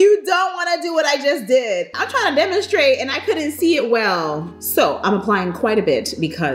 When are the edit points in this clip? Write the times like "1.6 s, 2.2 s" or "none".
4.5 s